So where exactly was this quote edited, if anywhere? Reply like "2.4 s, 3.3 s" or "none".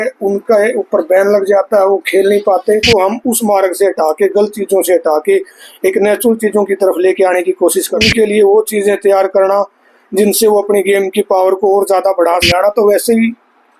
2.8 s, 8.0 s, 12.5 s